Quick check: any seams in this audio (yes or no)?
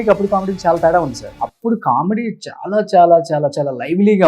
yes